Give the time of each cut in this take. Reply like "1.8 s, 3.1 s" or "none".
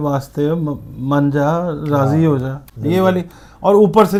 none